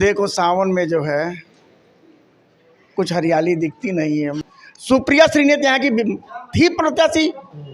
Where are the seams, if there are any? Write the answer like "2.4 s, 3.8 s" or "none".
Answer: 4.4 s